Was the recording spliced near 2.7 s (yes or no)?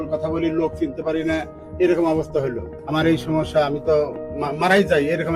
yes